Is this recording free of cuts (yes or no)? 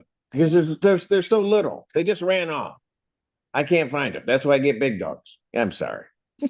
yes